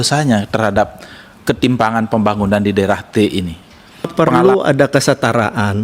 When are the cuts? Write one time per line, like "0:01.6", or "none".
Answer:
0:04.1